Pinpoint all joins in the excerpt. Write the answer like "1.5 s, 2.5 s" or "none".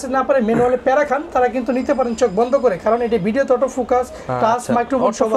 none